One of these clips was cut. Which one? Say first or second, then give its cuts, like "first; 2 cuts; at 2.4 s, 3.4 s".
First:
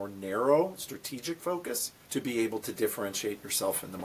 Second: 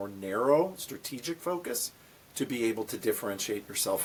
first; 1 cut; at 1.9 s